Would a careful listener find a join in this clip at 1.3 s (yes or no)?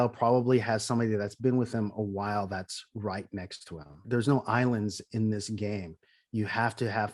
no